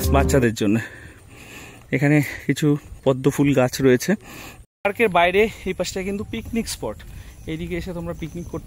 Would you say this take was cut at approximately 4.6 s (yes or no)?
yes